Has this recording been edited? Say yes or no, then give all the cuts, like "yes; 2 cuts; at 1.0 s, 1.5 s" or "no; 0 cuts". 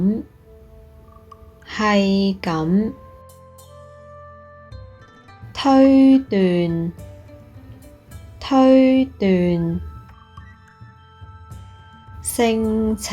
yes; 2 cuts; at 3.3 s, 5.4 s